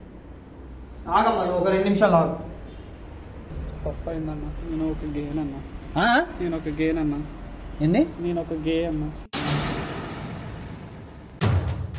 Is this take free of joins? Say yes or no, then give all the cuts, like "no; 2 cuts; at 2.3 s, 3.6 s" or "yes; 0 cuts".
yes; 0 cuts